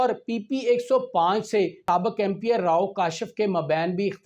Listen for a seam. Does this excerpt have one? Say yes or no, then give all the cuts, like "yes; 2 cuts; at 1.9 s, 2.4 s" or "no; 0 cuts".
yes; 1 cut; at 1.8 s